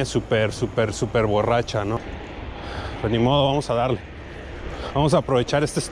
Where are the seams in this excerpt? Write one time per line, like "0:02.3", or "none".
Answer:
0:02.1

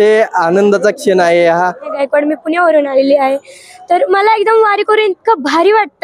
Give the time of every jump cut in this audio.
0:02.0

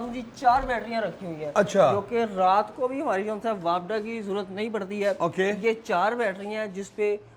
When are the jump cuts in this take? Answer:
none

